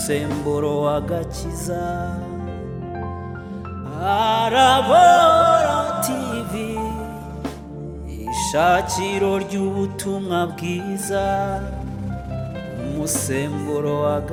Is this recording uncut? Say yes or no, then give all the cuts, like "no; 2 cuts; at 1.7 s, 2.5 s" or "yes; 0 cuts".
yes; 0 cuts